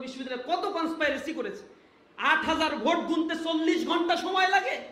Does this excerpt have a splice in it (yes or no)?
no